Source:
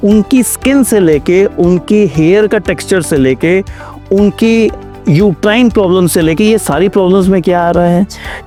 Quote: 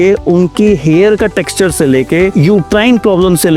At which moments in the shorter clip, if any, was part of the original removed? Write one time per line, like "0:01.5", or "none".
0:02.3